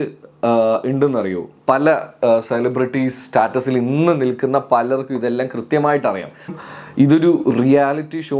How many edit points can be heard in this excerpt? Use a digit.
1